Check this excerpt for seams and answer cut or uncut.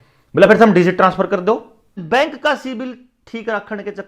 cut